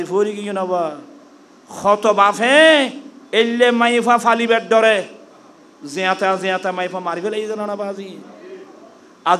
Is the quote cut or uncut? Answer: uncut